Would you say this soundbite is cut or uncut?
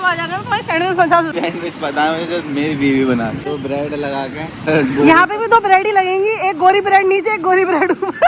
cut